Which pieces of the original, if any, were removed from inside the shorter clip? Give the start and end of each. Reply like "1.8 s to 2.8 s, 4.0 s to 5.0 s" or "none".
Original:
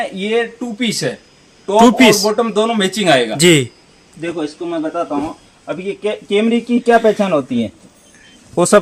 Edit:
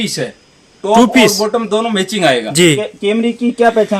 3.6 s to 6.1 s